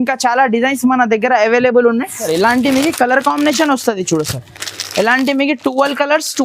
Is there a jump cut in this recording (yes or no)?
yes